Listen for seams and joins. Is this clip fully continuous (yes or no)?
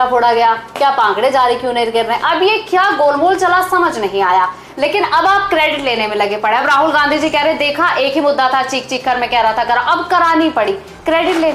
yes